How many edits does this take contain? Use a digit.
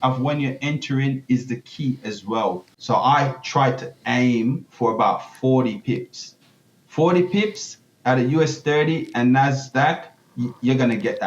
1